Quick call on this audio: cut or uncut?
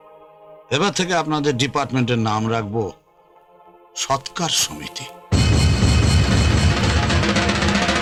uncut